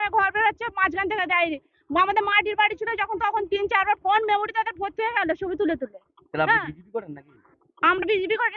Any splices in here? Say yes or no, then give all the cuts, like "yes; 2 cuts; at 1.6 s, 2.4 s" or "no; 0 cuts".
no; 0 cuts